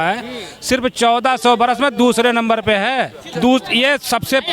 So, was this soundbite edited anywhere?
yes; 1 cut; at 3.3 s

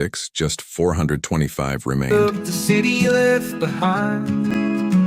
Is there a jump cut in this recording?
yes; 1 cut; at 2.1 s

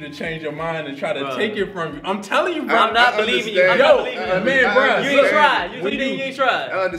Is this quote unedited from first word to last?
yes; 0 cuts

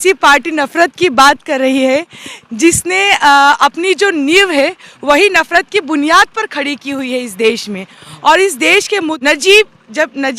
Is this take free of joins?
no; 1 cut; at 9.2 s

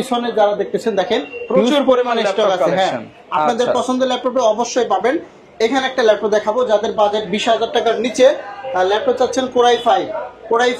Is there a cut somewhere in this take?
no; 0 cuts

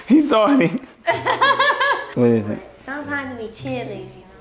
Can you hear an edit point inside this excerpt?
yes; 1 cut; at 2.1 s

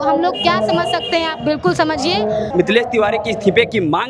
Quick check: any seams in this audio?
yes; 1 cut; at 2.5 s

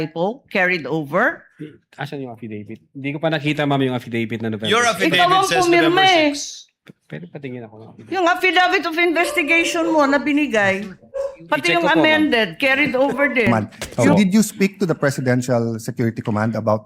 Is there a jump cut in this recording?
yes; 1 cut; at 13.5 s

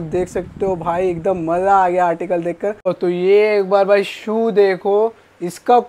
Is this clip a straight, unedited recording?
no; 1 cut; at 2.9 s

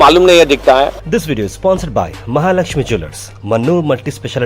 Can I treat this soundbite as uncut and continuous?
no; 1 cut; at 1.1 s

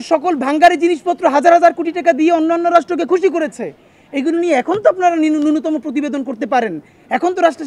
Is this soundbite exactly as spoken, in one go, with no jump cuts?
yes; 0 cuts

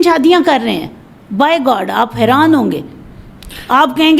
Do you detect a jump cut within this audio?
no; 0 cuts

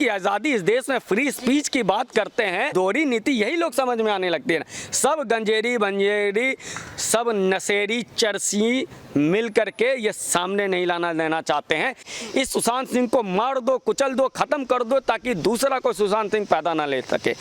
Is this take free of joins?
no; 2 cuts; at 2.7 s, 12.1 s

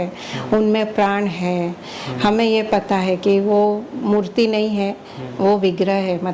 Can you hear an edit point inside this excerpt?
no; 0 cuts

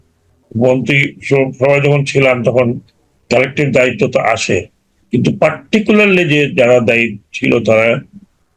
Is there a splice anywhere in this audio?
no; 0 cuts

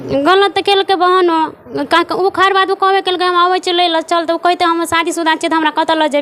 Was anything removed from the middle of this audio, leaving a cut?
no; 0 cuts

